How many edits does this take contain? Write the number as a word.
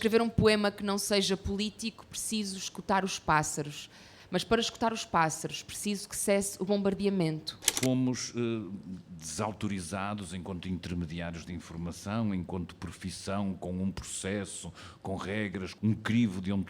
two